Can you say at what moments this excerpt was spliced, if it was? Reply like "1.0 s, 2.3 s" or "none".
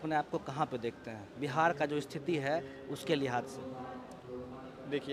none